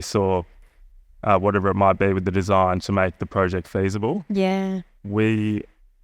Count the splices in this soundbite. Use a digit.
0